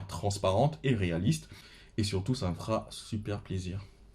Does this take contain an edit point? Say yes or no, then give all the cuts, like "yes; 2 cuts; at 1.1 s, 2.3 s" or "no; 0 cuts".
no; 0 cuts